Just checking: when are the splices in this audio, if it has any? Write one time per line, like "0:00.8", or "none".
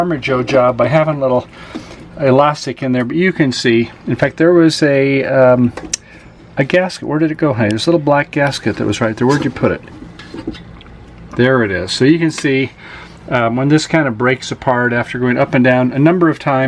none